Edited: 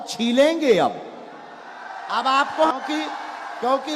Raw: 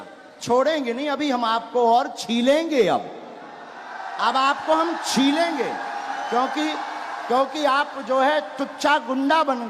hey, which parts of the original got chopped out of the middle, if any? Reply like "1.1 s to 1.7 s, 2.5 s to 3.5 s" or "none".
4.8 s to 6.4 s